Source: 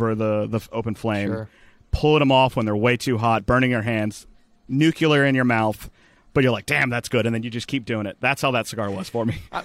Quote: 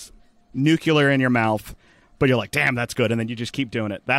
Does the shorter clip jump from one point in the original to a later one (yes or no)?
no